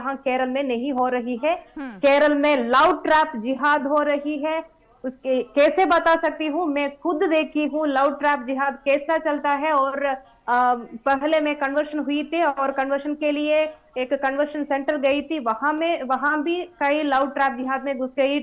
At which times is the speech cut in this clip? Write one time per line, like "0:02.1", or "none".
none